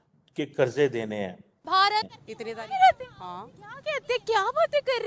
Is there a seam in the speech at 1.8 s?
yes; 1 cut; at 1.8 s

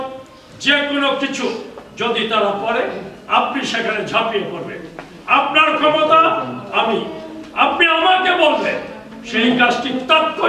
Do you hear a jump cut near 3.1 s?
no; 0 cuts

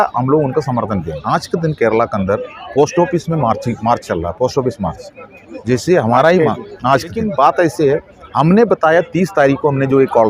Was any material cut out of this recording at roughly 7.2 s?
yes; 2 cuts; at 1.1 s, 7.2 s

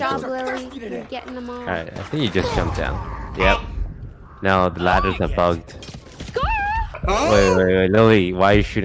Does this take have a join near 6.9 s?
yes; 1 cut; at 6.9 s

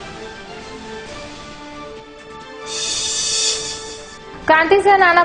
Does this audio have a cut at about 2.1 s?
yes; 1 cut; at 2.1 s

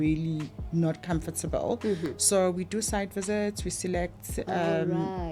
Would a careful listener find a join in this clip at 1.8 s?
no; 0 cuts

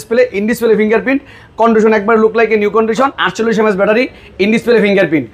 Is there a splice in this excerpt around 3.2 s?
yes; 1 cut; at 3.2 s

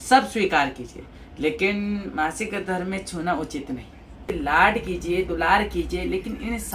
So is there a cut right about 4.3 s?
yes; 1 cut; at 4.3 s

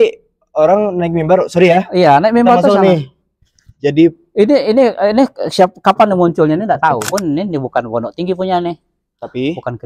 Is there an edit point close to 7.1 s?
yes; 1 cut; at 7.1 s

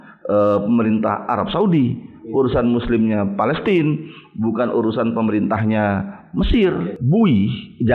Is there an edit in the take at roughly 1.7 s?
no; 1 cut; at 6.9 s

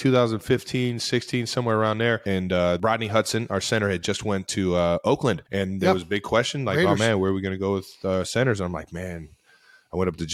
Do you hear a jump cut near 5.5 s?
yes; 2 cuts; at 2.8 s, 5.5 s

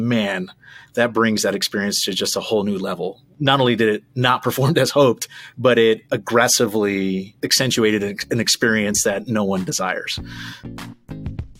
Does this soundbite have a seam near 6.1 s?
no; 2 cuts; at 3.4 s, 10.7 s

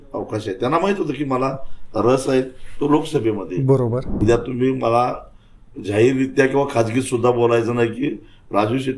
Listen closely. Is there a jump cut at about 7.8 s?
no; 1 cut; at 4.2 s

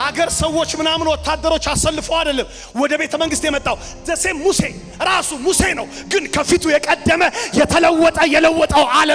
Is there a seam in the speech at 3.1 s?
no; 0 cuts

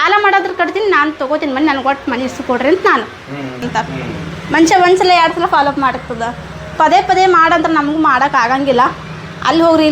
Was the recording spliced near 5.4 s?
no; 1 cut; at 3.6 s

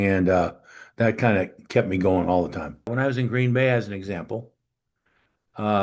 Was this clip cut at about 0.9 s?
no; 1 cut; at 2.9 s

